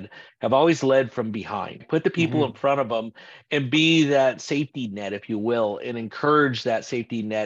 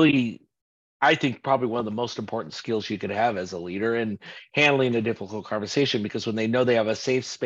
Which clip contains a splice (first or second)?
first